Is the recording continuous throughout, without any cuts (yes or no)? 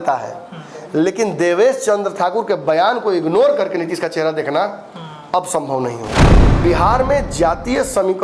no